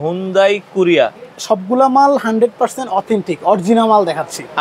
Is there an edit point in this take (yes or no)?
no